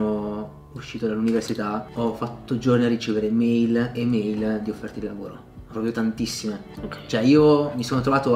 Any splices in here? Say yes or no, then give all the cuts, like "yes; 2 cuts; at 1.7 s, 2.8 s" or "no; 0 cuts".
yes; 1 cut; at 1.9 s